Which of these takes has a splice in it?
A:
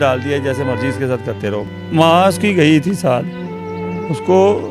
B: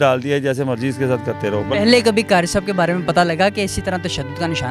A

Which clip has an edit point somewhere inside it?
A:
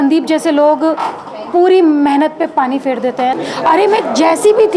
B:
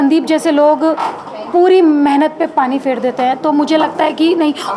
A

